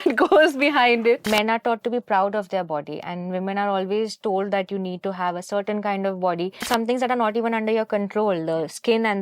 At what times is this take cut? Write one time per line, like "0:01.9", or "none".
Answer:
0:01.2
0:06.7